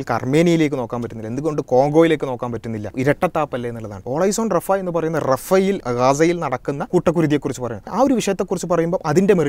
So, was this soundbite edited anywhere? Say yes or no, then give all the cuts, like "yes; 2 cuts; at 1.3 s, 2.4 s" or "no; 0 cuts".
yes; 5 cuts; at 2.9 s, 4.0 s, 5.8 s, 6.8 s, 7.9 s